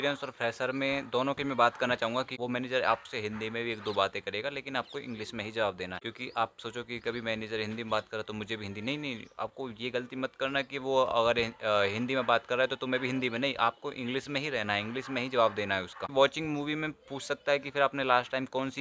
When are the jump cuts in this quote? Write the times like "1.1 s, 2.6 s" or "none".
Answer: 2.3 s, 16.0 s